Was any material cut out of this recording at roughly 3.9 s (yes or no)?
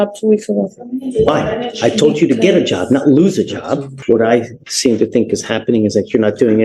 yes